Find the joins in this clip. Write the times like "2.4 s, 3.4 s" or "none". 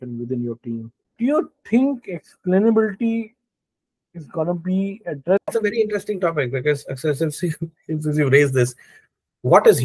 1.0 s, 5.5 s